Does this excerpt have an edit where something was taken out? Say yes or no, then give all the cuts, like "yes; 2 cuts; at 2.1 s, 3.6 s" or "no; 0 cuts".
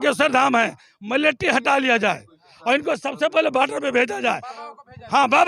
no; 0 cuts